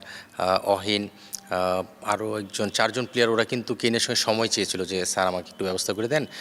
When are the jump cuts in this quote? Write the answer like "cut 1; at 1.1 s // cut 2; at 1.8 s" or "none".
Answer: none